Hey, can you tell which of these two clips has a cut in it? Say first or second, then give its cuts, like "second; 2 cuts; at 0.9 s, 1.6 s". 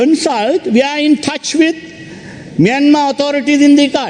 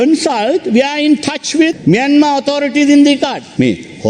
second; 1 cut; at 1.8 s